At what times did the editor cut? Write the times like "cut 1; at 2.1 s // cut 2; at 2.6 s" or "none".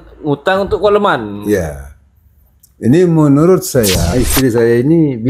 cut 1; at 4.1 s